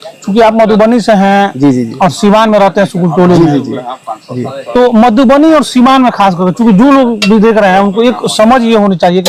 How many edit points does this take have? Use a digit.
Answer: 0